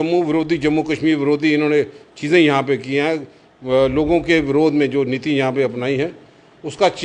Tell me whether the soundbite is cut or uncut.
uncut